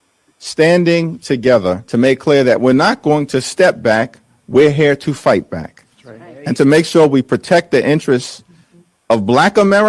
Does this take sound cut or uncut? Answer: cut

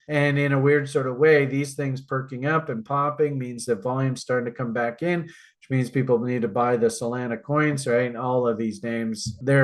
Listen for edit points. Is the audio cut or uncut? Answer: uncut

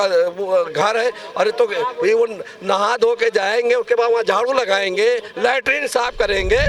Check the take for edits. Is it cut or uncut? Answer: uncut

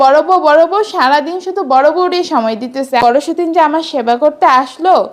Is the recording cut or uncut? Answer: cut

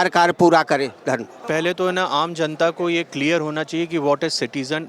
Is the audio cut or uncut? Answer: cut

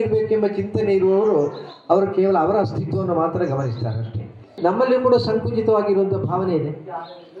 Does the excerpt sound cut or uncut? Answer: cut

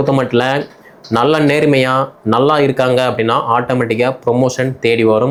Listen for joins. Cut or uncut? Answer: uncut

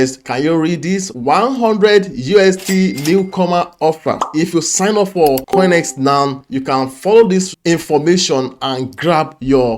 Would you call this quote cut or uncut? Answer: cut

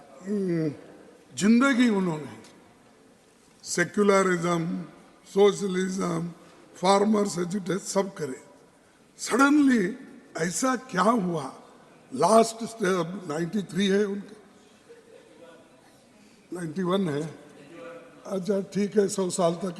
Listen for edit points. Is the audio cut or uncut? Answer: uncut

